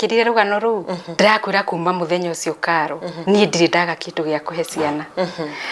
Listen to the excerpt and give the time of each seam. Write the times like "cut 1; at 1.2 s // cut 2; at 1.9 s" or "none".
cut 1; at 1.0 s // cut 2; at 3.1 s